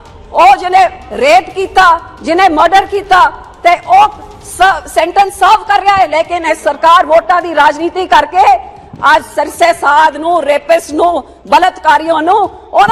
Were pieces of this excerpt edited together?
no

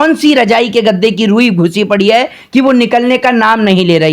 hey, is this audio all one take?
yes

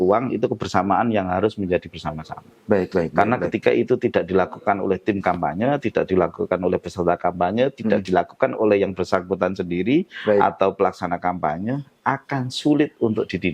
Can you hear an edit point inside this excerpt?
no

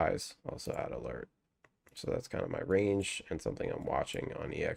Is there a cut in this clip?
no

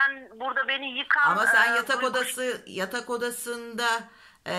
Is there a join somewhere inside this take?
no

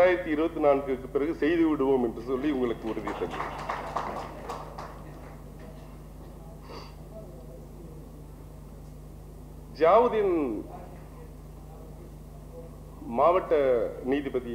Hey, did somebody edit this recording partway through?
no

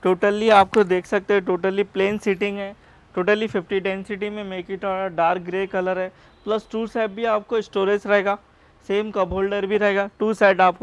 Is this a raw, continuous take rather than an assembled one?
yes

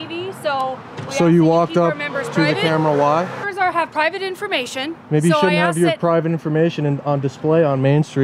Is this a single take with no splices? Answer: no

